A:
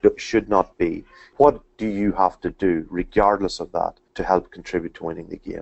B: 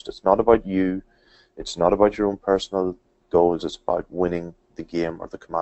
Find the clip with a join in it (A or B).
A